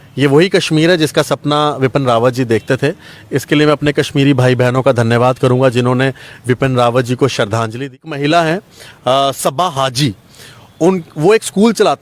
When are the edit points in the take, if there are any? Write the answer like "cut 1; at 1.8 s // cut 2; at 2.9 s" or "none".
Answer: cut 1; at 8.0 s